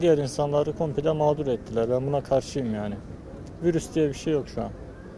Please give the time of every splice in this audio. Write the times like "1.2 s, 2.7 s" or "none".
none